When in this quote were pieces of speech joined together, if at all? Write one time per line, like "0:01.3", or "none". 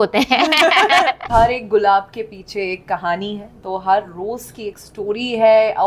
0:01.2